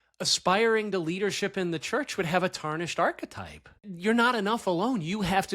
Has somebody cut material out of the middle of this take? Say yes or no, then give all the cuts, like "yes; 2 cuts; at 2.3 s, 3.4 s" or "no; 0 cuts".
yes; 1 cut; at 3.9 s